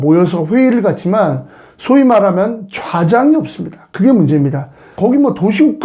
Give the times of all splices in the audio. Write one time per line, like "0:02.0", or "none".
0:04.9